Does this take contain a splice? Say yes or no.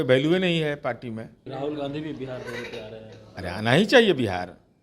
yes